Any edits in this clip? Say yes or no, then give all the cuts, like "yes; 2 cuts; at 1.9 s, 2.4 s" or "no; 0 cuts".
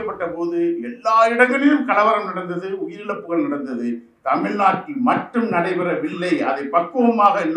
no; 0 cuts